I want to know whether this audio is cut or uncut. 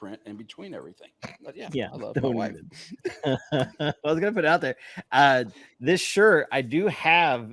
uncut